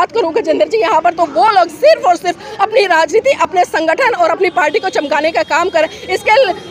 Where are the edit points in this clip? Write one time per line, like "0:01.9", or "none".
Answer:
none